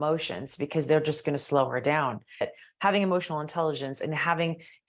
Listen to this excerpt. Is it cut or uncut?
cut